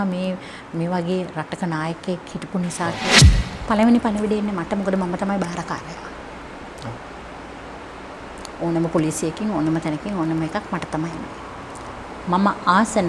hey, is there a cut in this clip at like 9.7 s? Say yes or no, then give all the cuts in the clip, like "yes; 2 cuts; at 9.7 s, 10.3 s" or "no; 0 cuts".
no; 1 cut; at 3.3 s